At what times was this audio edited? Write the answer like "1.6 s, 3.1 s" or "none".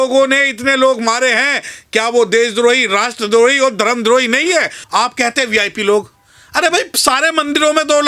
4.8 s